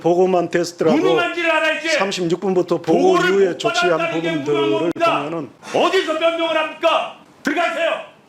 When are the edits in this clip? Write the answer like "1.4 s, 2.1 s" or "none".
5.5 s, 7.2 s

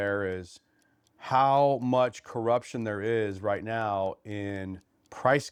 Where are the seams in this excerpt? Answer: none

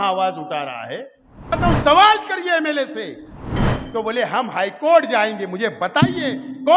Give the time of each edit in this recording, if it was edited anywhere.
1.6 s, 3.7 s

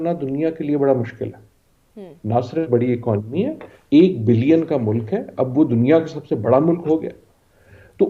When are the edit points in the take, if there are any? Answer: none

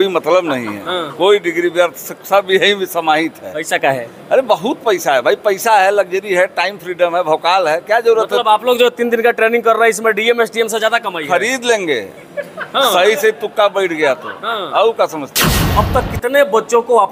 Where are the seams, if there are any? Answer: 15.7 s

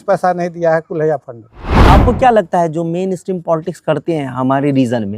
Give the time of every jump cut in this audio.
1.7 s

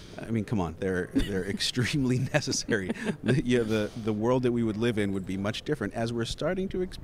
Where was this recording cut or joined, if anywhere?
none

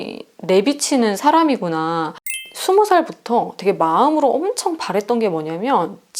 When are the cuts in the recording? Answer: 2.4 s

